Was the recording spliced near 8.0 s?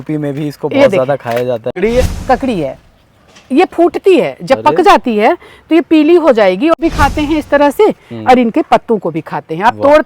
no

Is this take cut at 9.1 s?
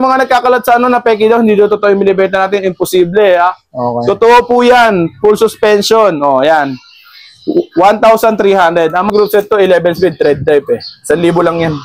yes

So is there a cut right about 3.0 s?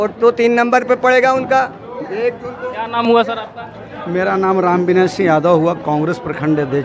no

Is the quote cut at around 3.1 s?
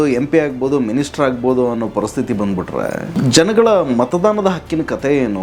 yes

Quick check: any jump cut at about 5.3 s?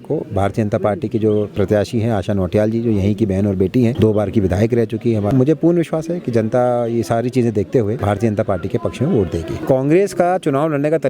yes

